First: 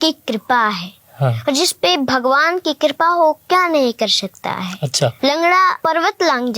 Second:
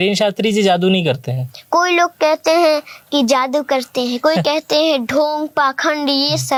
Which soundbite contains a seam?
first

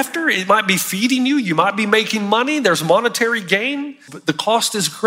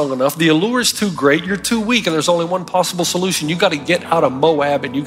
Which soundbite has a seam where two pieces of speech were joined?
first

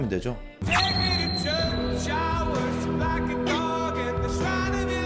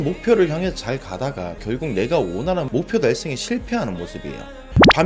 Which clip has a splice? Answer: second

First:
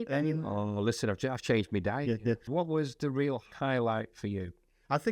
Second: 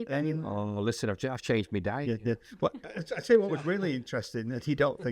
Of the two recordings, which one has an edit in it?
first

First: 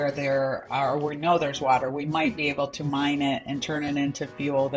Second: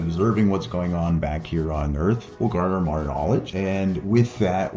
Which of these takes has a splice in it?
second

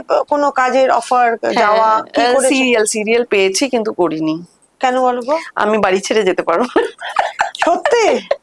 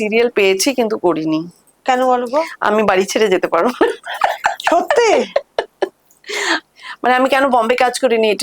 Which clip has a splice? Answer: second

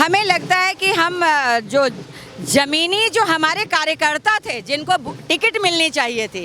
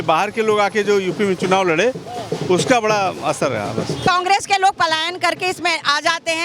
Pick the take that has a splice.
second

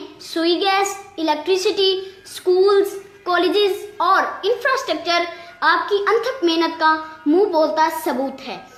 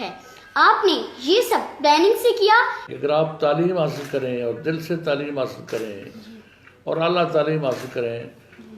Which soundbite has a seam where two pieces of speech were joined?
second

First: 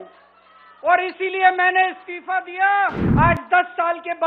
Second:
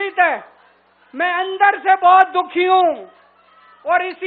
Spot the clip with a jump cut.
first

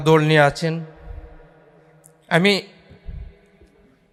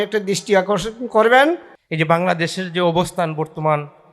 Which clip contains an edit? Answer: second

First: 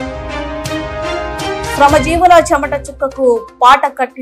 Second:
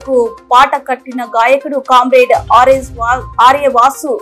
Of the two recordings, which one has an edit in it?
first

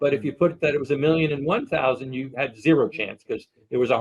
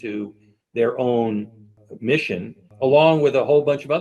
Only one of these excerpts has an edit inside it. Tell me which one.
second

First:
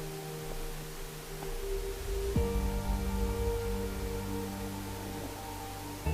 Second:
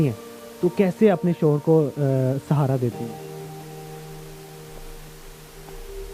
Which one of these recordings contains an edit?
second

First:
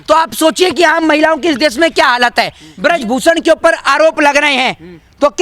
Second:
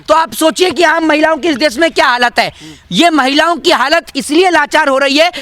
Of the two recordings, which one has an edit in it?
first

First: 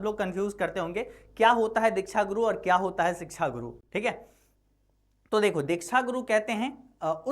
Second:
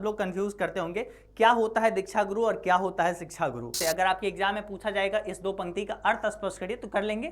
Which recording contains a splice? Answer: second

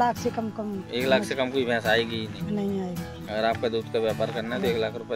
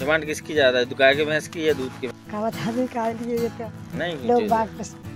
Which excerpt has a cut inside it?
second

